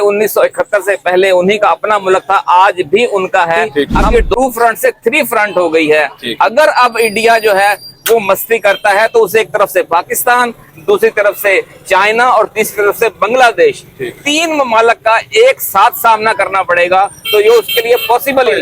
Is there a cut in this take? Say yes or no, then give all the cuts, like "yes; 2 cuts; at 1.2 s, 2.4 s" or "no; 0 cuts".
yes; 1 cut; at 3.9 s